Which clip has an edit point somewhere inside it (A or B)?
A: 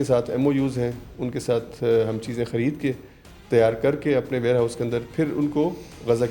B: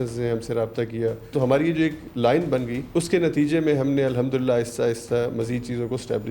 B